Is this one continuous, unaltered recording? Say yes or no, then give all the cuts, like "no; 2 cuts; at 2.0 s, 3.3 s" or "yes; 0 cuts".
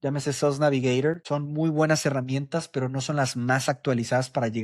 no; 1 cut; at 1.2 s